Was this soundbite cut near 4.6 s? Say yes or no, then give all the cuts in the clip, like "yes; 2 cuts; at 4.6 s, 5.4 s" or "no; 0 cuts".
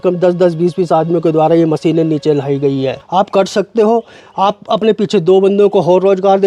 no; 1 cut; at 3.0 s